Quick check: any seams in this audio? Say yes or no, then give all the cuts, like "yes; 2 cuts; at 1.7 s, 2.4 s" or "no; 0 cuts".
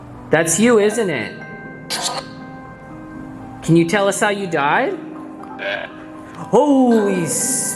yes; 1 cut; at 3.5 s